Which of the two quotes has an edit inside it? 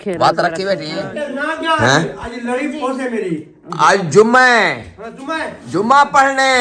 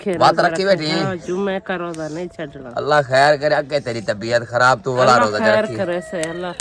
first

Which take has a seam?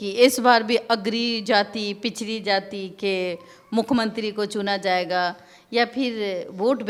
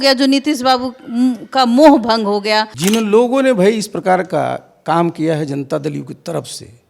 second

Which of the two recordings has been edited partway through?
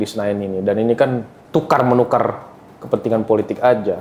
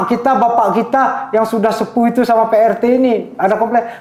first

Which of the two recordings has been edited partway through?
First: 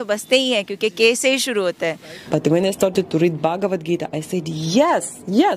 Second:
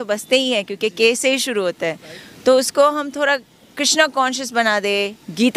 first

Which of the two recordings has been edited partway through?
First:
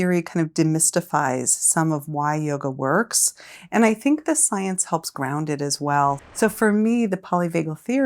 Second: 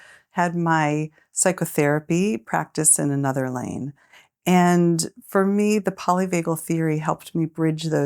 first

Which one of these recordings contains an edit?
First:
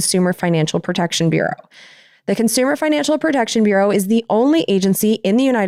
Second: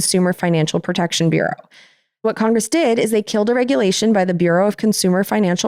second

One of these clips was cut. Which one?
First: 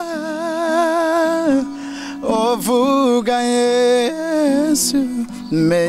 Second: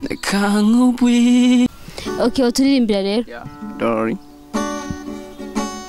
second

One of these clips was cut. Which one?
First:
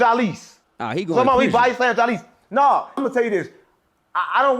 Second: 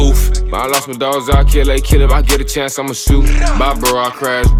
first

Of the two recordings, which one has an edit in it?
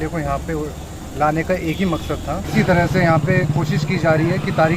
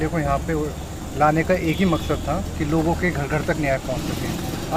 first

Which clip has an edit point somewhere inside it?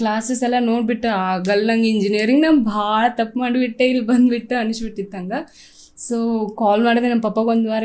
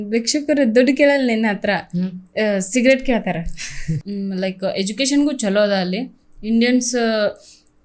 second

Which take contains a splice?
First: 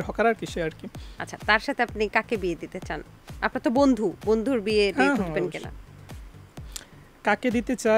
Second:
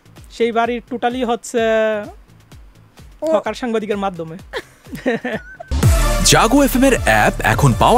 second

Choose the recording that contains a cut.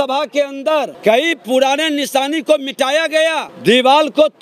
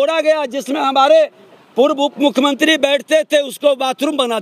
first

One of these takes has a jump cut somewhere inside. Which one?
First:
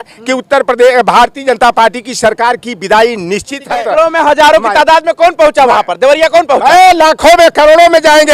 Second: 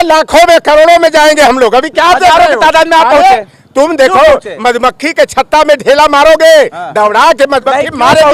first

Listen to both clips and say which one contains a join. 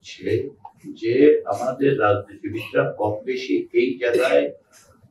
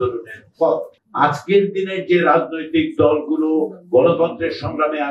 second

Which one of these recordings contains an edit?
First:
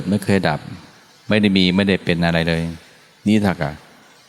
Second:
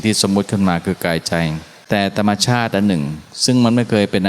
second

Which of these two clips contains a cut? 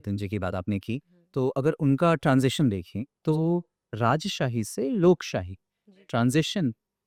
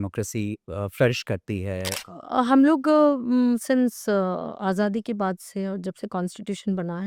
second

